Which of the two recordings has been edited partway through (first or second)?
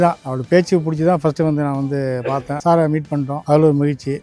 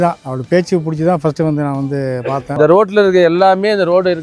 second